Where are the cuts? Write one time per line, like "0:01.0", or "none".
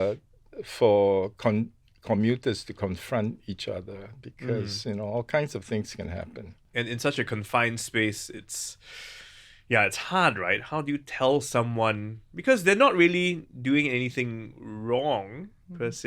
none